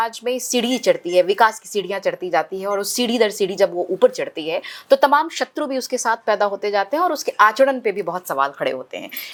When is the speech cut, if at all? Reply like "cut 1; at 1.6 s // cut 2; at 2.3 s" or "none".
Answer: none